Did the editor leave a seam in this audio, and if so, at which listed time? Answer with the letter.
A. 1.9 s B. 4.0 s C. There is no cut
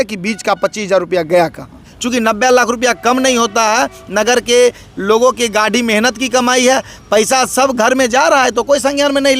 A